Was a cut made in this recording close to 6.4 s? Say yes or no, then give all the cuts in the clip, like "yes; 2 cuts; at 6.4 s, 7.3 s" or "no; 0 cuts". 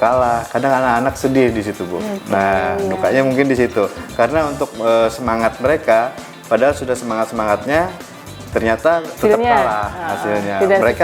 no; 1 cut; at 9.1 s